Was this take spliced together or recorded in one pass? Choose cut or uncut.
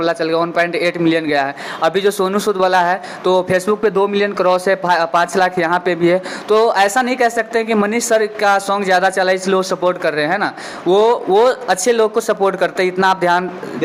uncut